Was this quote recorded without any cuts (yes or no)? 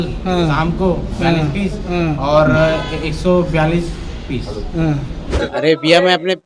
no